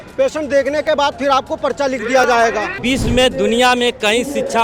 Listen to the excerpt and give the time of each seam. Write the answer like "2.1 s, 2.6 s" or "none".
2.8 s